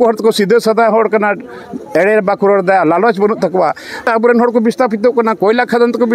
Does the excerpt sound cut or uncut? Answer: cut